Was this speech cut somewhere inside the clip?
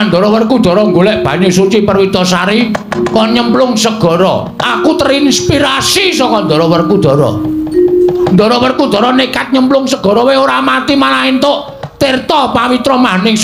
no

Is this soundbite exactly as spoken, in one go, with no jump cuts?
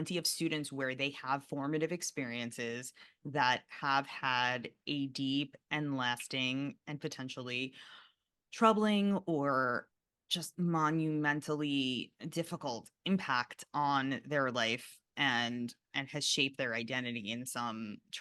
no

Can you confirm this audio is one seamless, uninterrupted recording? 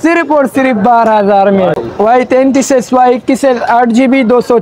no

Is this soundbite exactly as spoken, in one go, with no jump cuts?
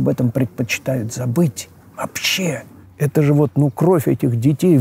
yes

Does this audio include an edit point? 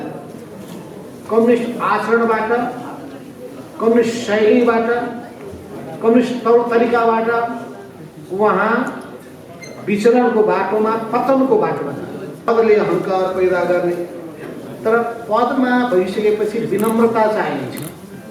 yes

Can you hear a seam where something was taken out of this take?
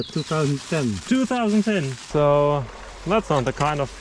yes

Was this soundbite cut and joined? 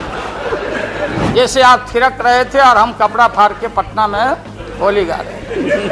yes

